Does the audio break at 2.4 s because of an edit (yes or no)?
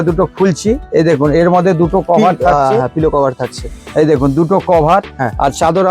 no